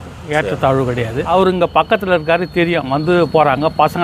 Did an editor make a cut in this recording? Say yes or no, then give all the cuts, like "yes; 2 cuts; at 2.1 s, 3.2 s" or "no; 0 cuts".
yes; 1 cut; at 1.3 s